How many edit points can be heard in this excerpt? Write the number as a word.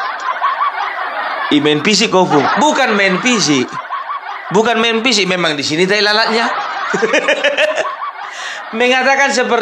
one